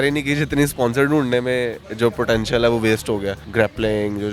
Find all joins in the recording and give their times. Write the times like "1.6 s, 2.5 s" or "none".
3.4 s